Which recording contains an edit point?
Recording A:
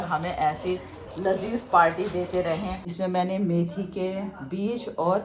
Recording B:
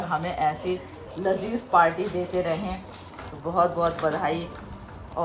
A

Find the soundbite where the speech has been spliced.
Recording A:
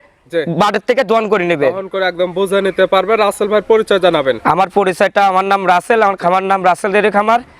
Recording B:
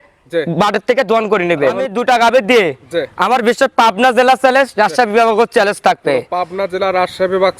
B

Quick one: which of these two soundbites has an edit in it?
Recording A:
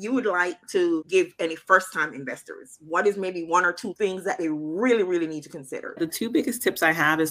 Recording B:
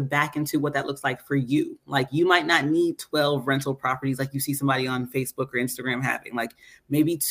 A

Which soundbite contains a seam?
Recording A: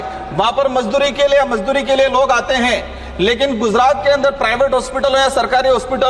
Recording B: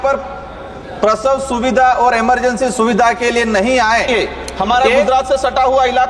B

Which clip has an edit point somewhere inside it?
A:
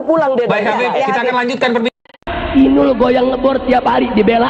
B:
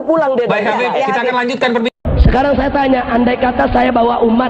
B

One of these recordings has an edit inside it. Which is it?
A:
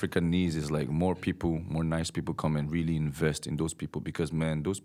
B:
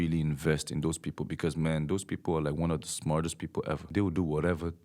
B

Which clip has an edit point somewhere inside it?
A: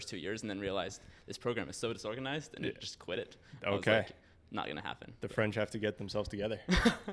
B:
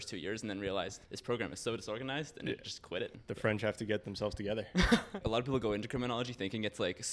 B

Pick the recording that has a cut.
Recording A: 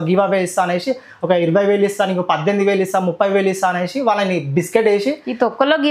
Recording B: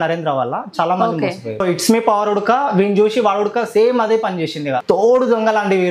B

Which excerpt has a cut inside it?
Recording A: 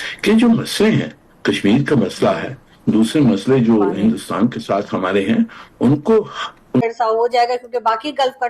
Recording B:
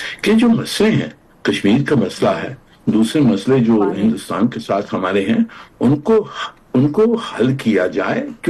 A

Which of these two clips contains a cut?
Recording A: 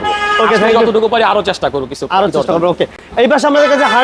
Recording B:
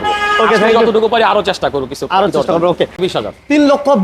B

